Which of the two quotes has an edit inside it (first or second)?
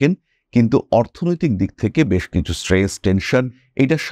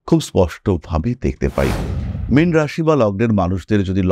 second